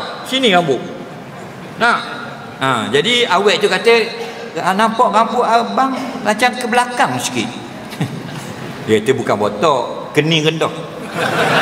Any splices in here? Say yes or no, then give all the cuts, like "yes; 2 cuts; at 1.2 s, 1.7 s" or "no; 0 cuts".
no; 0 cuts